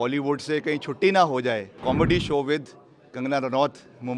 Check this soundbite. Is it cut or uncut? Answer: cut